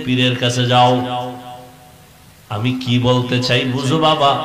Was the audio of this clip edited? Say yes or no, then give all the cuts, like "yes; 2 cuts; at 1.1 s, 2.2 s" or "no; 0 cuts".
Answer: no; 0 cuts